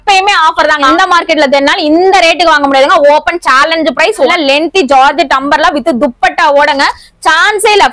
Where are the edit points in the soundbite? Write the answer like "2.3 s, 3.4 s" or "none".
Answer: 0.9 s, 4.3 s

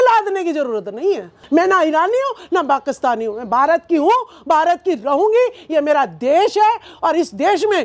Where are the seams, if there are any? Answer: 1.3 s

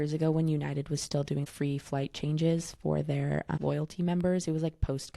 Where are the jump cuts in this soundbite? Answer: 1.4 s, 3.6 s

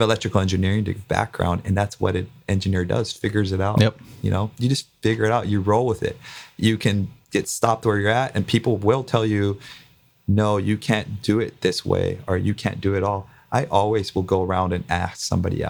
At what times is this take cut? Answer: none

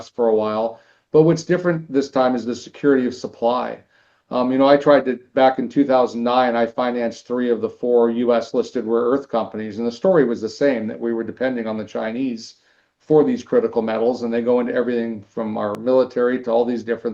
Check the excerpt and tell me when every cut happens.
15.8 s

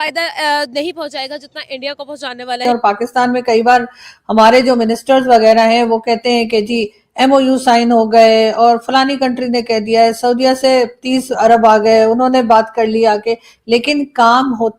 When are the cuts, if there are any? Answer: 2.7 s

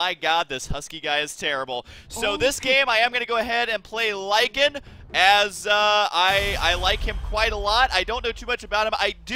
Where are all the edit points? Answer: 5.5 s

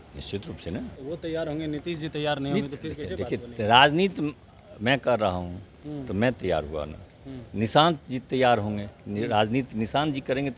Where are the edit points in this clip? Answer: 1.0 s

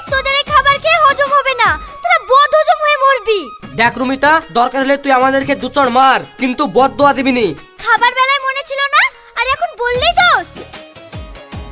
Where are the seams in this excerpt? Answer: none

